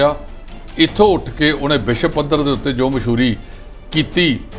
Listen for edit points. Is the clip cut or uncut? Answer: uncut